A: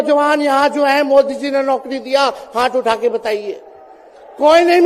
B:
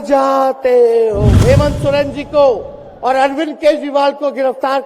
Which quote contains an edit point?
B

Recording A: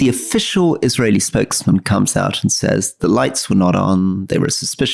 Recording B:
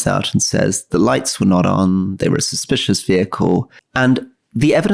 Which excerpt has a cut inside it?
B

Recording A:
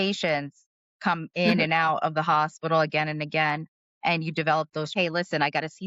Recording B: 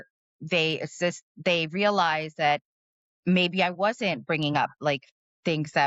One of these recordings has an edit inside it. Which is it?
A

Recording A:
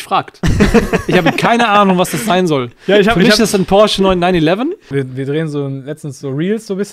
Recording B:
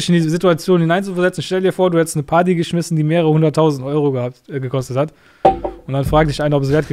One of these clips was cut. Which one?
A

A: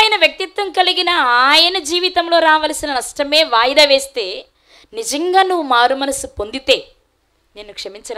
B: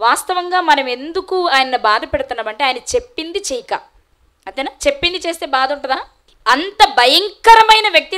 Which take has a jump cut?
B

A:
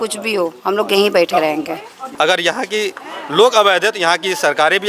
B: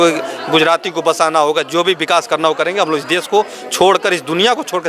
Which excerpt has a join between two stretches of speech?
A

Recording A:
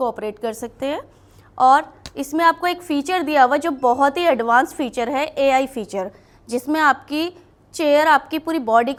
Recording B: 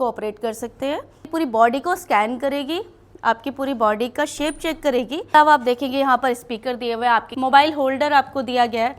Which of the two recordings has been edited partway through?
B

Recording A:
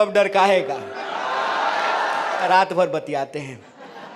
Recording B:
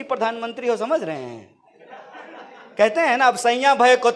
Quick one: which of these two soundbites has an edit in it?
A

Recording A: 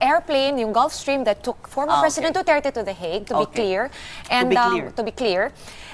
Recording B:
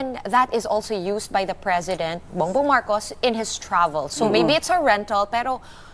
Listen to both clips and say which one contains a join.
A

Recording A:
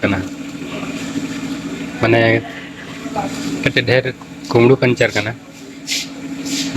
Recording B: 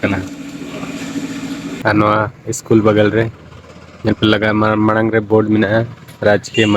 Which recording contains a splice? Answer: B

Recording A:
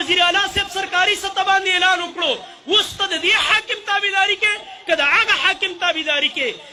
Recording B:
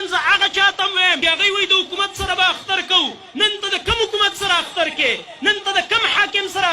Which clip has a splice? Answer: B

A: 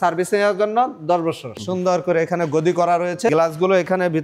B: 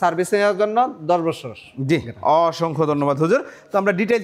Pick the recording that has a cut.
A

